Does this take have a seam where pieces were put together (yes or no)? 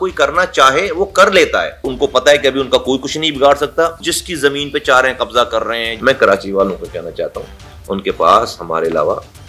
yes